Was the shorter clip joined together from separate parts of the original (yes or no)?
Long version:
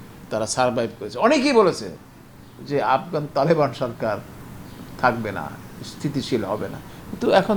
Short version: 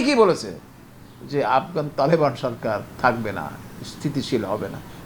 yes